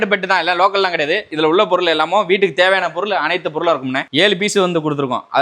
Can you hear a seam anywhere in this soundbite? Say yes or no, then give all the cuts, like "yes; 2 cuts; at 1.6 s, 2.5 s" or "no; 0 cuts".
yes; 2 cuts; at 1.3 s, 4.0 s